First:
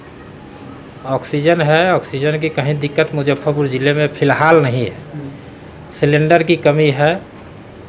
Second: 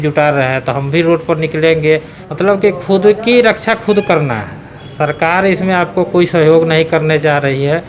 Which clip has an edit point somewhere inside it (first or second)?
second